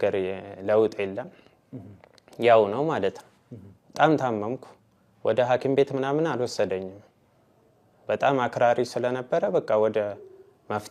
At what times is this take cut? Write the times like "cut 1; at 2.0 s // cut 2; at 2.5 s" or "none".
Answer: none